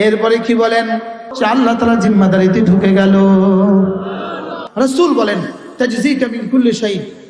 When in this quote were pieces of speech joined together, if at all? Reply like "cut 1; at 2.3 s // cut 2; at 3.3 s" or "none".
cut 1; at 1.2 s // cut 2; at 4.6 s